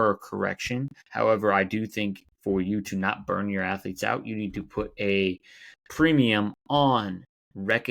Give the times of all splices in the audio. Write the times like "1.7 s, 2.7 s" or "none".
1.0 s, 2.3 s